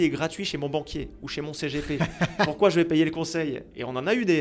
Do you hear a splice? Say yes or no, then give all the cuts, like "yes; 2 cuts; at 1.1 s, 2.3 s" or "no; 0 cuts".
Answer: no; 0 cuts